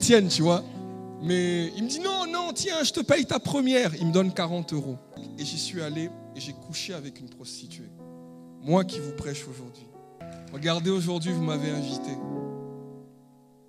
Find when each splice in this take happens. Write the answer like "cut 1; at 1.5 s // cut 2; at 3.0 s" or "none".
cut 1; at 5.2 s // cut 2; at 10.3 s